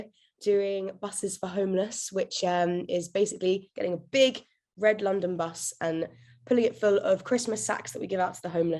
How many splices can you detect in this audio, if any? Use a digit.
0